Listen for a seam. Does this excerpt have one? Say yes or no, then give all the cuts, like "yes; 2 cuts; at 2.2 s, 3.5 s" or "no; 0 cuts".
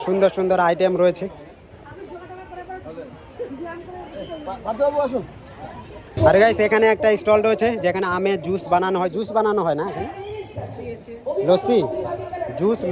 no; 0 cuts